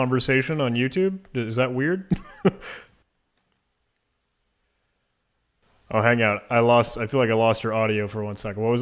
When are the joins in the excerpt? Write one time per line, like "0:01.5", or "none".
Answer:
none